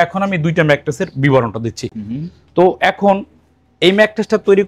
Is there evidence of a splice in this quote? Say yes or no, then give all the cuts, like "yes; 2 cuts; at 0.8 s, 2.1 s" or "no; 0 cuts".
no; 0 cuts